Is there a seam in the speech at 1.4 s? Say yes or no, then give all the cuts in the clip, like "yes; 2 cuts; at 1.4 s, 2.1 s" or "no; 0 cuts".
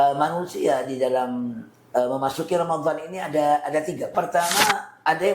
no; 1 cut; at 4.1 s